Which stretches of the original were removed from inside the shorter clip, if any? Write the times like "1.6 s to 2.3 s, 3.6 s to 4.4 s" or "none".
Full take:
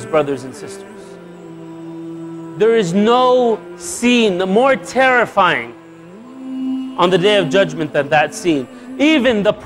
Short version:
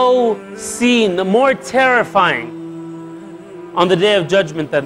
none